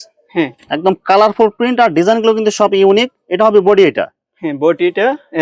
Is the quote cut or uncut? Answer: uncut